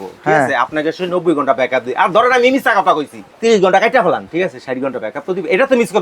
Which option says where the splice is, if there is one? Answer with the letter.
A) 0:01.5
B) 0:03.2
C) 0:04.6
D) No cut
B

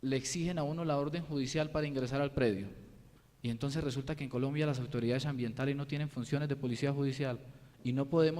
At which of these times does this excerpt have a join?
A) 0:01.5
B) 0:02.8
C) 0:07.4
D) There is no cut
C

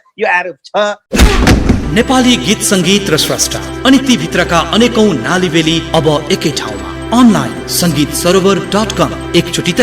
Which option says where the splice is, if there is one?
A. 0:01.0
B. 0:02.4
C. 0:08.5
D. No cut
A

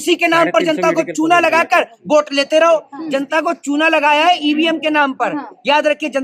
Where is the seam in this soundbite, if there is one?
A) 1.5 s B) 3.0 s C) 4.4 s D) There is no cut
B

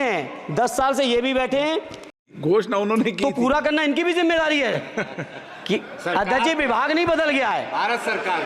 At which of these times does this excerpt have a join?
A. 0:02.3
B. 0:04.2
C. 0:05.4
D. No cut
A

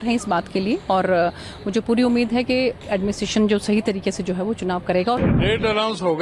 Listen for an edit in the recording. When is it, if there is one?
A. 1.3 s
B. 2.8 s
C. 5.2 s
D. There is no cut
C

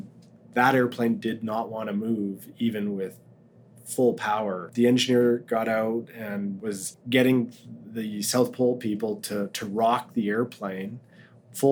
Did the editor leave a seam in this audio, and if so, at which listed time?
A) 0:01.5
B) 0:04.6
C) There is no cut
B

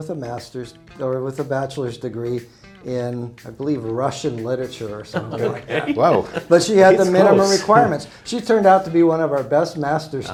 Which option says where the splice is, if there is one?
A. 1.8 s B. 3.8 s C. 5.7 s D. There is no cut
D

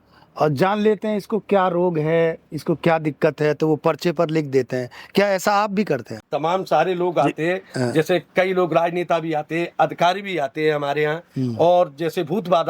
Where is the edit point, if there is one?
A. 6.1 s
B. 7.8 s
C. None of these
A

